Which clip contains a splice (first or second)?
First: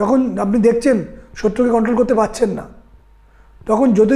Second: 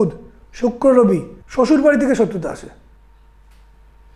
second